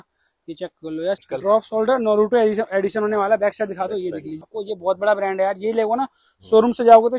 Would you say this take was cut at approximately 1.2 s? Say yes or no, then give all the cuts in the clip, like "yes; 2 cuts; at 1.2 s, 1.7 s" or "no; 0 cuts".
yes; 2 cuts; at 1.2 s, 4.5 s